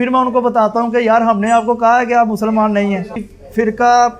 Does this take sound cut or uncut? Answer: cut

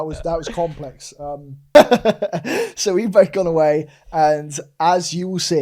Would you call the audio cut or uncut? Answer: cut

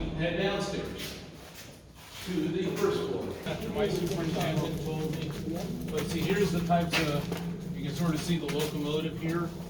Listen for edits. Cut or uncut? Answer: cut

